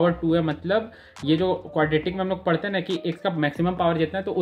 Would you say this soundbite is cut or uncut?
uncut